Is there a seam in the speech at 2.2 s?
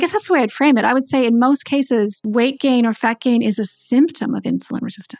yes; 1 cut; at 2.2 s

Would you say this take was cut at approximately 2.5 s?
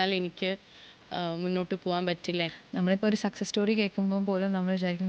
yes; 1 cut; at 2.5 s

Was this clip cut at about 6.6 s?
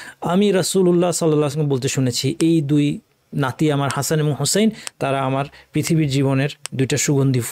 yes; 1 cut; at 6.6 s

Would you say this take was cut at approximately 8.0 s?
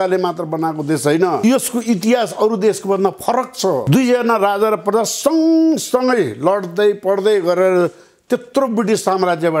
no; 2 cuts; at 1.4 s, 3.8 s

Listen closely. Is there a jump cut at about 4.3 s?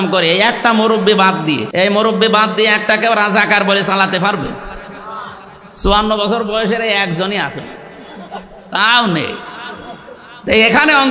no; 1 cut; at 1.7 s

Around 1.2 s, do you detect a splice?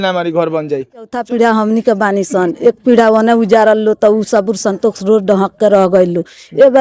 yes; 1 cut; at 1.2 s

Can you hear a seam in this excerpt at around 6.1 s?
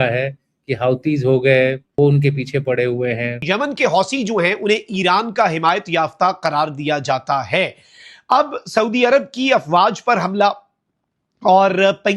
no; 2 cuts; at 1.9 s, 3.4 s

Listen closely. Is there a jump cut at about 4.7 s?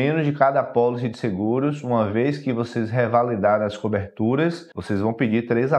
yes; 1 cut; at 4.7 s

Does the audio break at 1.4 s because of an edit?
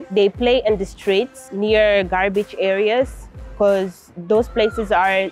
yes; 1 cut; at 1.4 s

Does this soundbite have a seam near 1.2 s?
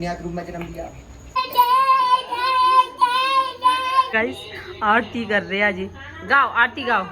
yes; 2 cuts; at 1.2 s, 4.1 s

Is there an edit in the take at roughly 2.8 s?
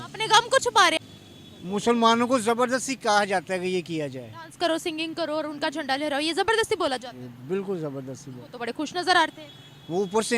no; 1 cut; at 1.0 s

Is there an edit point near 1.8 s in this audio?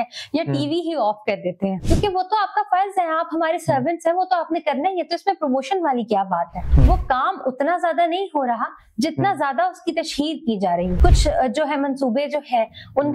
yes; 3 cuts; at 1.8 s, 6.6 s, 10.9 s

